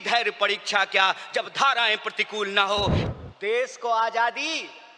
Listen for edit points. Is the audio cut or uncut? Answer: cut